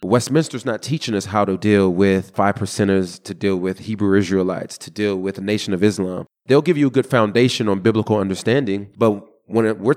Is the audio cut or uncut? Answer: cut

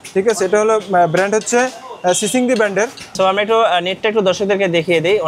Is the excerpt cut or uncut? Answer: cut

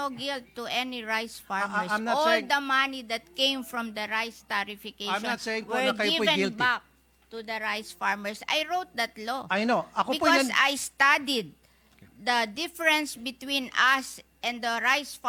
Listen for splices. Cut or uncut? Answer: uncut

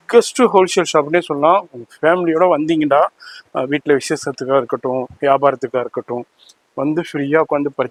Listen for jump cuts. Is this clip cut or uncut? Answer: uncut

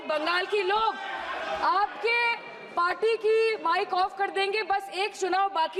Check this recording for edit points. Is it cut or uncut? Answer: uncut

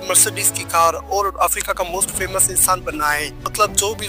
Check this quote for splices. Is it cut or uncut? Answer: uncut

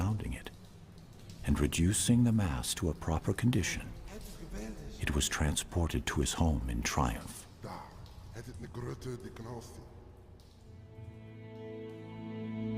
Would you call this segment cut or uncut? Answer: cut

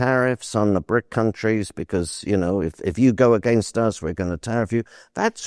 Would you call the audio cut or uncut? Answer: uncut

